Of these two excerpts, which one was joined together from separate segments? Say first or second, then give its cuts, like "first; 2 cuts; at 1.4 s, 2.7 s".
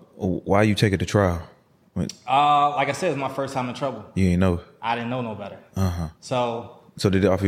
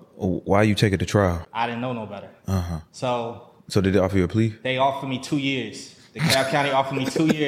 second; 1 cut; at 1.5 s